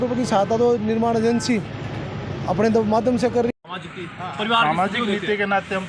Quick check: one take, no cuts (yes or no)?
no